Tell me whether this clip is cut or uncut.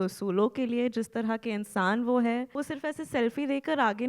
cut